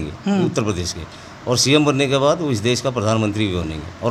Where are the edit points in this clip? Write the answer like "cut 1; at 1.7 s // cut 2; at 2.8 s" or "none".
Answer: none